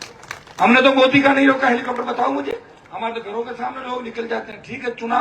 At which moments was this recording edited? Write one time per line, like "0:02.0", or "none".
none